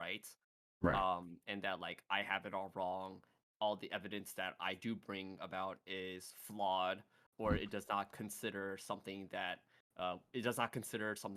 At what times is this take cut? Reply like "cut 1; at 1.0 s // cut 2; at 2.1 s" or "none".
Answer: none